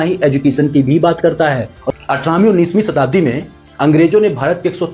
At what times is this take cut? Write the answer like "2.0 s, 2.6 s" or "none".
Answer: 1.8 s